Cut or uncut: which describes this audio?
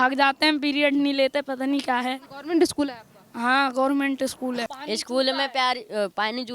cut